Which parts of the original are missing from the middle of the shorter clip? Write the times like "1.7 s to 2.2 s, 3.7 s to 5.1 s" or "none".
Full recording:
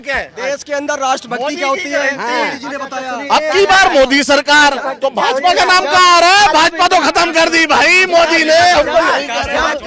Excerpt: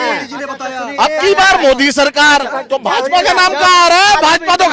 none